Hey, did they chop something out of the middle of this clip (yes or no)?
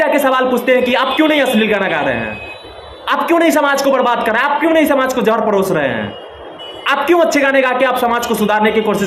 no